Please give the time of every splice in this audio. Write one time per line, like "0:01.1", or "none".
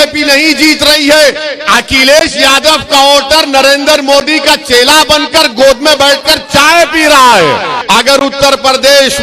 0:07.7